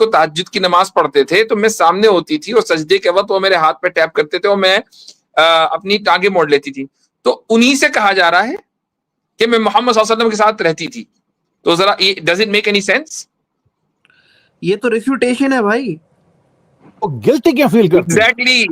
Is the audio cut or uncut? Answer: uncut